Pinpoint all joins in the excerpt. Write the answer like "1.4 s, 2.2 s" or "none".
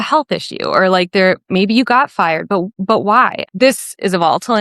3.5 s